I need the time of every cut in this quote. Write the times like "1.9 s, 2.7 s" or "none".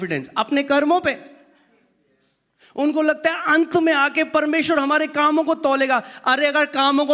none

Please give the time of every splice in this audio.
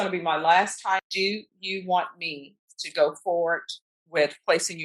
1.1 s

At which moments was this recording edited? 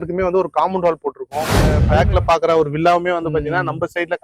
1.8 s

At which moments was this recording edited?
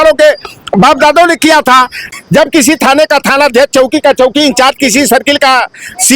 2.0 s

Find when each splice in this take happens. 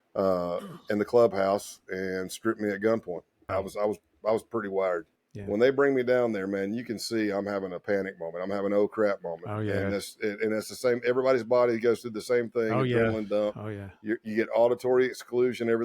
3.4 s, 5.2 s

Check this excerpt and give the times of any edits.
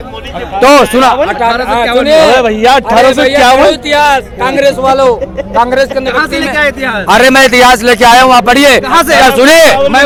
none

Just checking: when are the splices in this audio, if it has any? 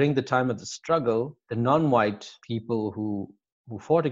1.4 s, 2.3 s

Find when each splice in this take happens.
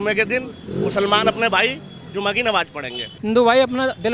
3.1 s

